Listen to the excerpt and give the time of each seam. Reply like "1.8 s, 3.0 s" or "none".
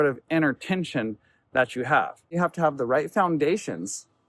2.4 s